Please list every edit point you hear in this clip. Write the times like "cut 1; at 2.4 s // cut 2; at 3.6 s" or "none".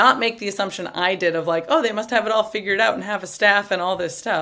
none